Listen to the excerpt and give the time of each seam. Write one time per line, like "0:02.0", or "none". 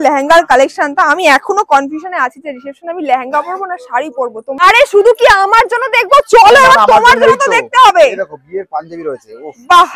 0:04.6